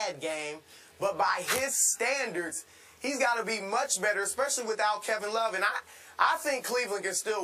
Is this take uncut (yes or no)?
yes